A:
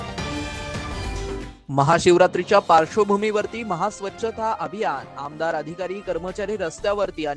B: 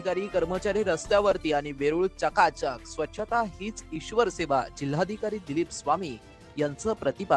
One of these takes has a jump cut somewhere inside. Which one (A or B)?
A